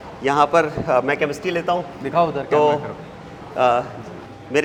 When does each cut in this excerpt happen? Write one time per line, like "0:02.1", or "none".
none